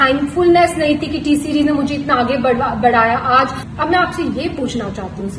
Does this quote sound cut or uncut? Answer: cut